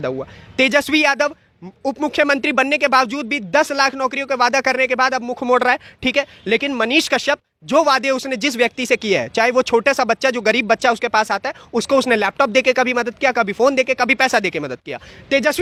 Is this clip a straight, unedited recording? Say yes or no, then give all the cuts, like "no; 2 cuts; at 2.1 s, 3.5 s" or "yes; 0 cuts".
yes; 0 cuts